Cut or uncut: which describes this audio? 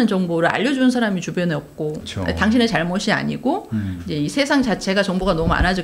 cut